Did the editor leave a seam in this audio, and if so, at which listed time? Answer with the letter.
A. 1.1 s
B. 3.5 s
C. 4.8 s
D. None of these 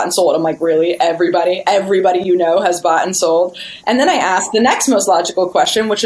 D